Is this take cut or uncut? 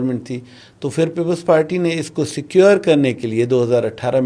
uncut